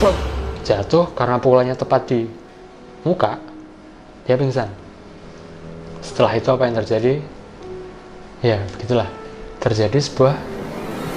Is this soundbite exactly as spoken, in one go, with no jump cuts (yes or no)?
yes